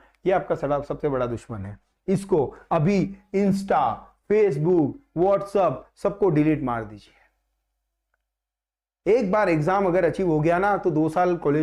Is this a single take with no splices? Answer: yes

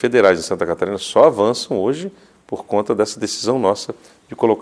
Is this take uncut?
yes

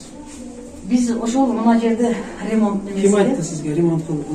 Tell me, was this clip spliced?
no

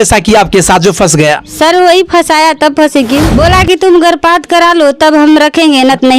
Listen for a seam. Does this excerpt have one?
yes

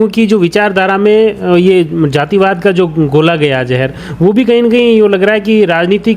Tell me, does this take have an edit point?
no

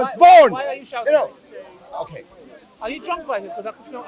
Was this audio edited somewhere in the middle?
no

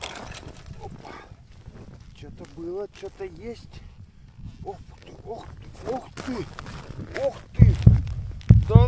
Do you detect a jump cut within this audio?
yes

